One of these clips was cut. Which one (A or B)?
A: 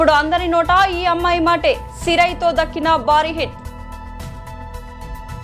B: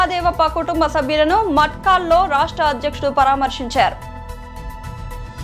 A